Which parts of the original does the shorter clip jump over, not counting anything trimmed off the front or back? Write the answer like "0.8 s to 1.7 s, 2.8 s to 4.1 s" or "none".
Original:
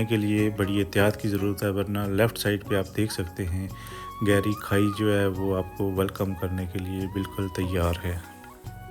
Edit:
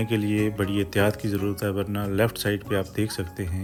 none